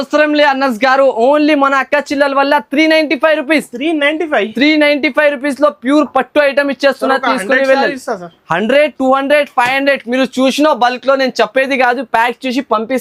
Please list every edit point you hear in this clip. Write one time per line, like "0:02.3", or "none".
none